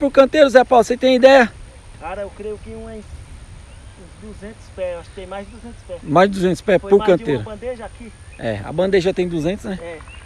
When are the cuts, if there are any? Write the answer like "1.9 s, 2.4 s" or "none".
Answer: none

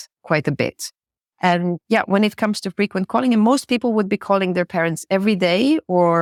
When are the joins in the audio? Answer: none

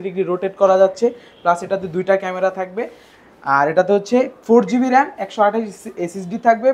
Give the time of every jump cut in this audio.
none

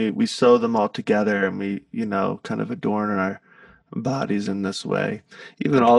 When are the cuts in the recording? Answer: none

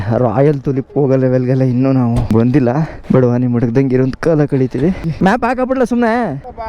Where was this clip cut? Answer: 3.0 s, 5.1 s

